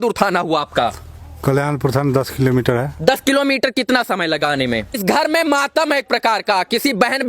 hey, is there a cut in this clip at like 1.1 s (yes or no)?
no